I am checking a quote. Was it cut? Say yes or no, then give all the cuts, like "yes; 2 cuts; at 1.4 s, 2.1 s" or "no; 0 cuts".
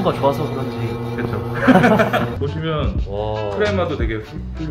no; 0 cuts